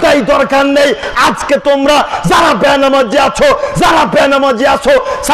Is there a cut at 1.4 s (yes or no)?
no